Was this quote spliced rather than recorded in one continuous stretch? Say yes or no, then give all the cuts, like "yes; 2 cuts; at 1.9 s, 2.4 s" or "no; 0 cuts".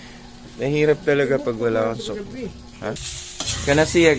yes; 1 cut; at 3.0 s